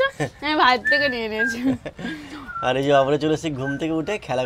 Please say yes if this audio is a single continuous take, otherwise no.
yes